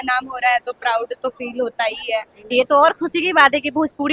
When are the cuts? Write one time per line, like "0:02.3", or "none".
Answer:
0:02.5